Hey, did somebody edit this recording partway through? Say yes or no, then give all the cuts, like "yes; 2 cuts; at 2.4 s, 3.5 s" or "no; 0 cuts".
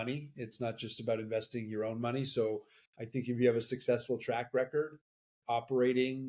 no; 0 cuts